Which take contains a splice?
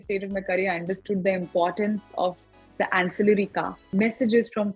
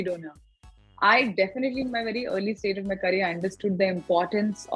first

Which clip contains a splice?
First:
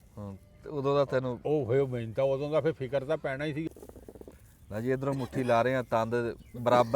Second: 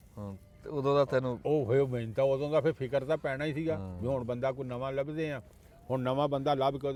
first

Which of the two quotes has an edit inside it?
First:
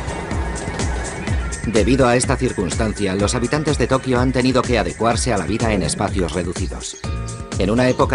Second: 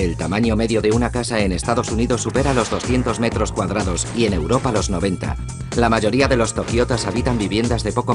first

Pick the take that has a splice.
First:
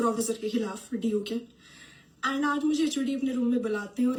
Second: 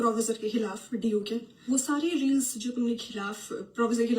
second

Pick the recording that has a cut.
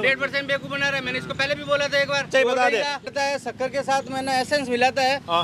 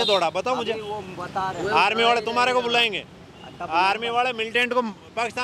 first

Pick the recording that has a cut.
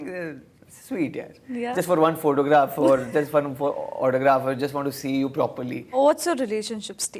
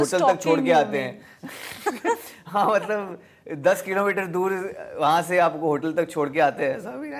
first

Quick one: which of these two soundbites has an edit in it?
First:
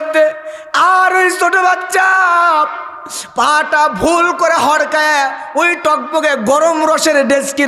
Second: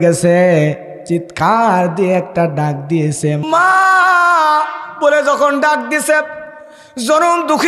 second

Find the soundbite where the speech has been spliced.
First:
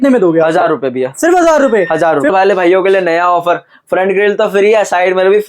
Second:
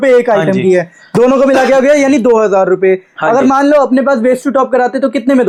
first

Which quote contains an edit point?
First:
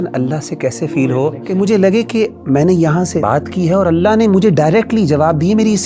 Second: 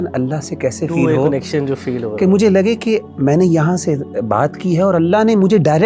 first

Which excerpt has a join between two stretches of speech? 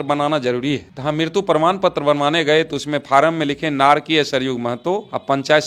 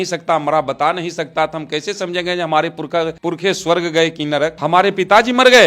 second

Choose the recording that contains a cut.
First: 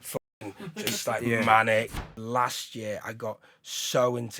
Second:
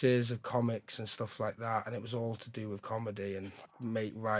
first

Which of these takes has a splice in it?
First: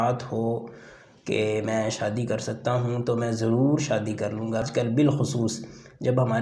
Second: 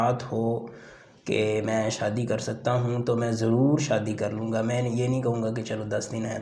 first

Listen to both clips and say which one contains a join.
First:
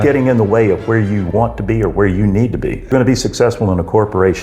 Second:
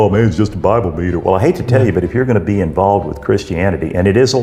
first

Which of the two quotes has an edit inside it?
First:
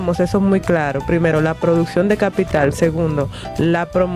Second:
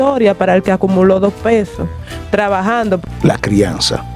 second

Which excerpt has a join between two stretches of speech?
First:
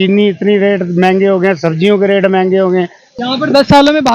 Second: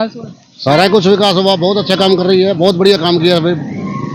first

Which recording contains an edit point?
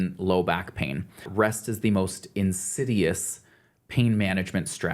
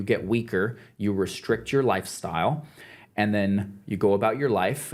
first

